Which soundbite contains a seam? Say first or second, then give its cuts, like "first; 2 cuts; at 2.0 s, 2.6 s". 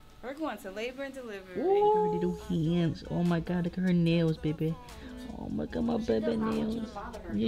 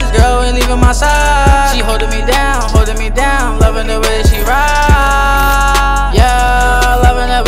first; 1 cut; at 2.2 s